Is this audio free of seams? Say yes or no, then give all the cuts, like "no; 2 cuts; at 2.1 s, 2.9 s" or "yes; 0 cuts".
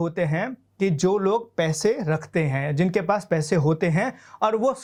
yes; 0 cuts